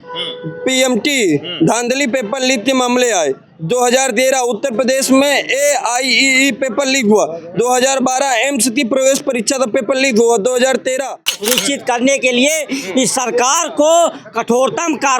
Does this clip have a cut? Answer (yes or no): yes